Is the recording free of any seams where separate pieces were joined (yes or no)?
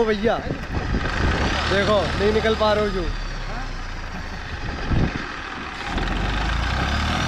yes